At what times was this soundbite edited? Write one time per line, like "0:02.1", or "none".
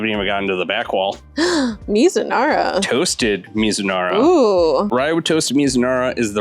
0:01.2